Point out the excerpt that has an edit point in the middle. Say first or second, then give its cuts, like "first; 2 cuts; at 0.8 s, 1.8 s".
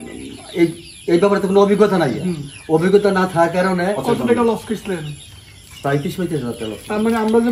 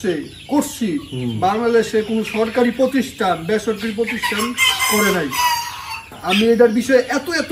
first; 1 cut; at 4.0 s